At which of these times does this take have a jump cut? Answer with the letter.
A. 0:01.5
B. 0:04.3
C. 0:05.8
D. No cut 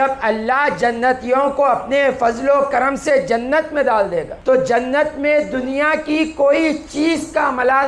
B